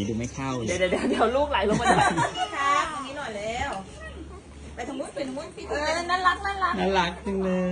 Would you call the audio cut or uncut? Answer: cut